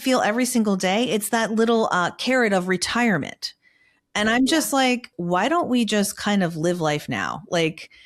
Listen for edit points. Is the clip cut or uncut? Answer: cut